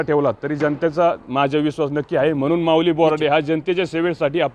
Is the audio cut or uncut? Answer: uncut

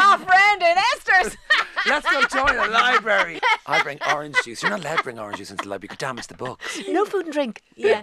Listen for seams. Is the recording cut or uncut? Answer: uncut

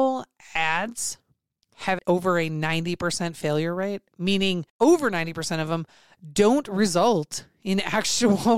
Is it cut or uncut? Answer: cut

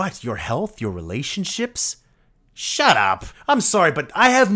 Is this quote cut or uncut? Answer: cut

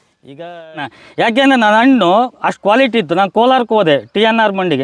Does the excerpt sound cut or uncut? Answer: cut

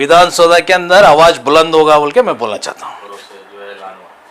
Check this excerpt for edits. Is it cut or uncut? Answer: uncut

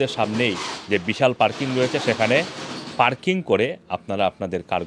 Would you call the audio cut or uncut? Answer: uncut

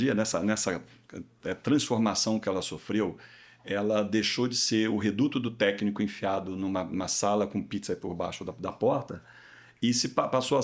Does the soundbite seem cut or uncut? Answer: uncut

